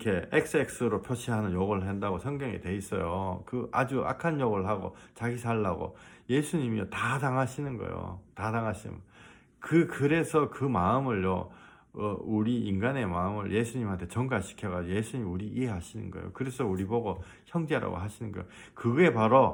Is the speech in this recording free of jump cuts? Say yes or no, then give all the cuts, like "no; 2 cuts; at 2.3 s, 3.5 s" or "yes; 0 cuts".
yes; 0 cuts